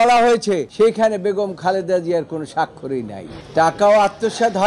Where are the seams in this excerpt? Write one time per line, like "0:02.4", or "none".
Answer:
0:03.4